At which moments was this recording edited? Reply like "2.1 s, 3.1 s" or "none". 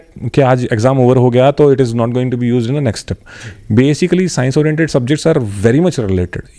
none